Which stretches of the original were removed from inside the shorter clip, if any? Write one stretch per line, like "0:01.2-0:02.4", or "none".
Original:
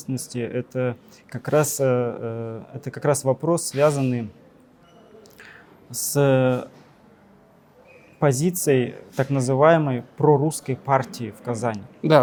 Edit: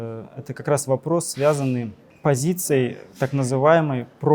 0:04.4-0:08.0